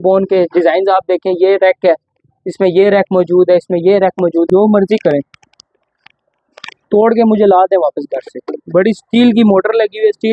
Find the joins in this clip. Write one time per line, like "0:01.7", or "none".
0:04.5